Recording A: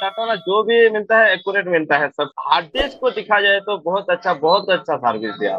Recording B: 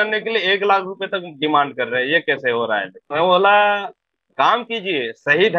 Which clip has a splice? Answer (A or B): B